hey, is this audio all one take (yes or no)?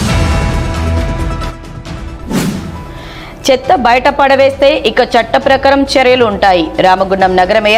no